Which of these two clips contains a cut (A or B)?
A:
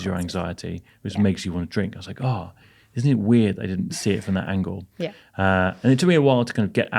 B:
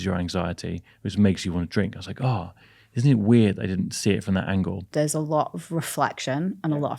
B